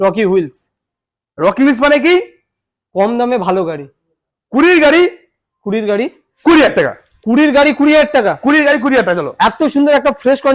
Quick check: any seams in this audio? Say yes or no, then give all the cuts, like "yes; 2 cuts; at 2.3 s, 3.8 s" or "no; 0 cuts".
no; 0 cuts